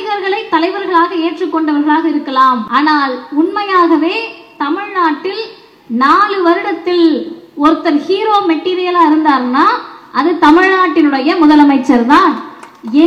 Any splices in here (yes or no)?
yes